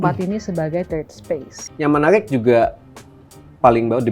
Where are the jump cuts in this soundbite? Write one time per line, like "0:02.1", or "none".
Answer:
0:01.6